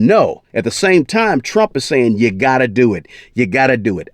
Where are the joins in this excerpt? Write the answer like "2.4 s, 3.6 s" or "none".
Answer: none